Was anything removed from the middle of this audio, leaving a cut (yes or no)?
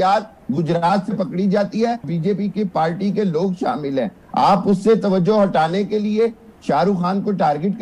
yes